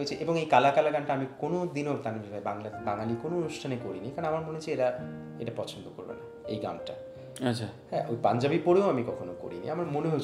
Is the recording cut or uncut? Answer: uncut